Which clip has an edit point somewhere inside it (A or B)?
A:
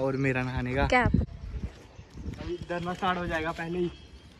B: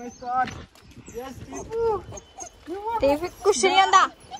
A